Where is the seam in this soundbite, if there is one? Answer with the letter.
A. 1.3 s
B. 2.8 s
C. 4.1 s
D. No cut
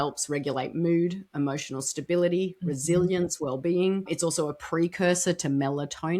C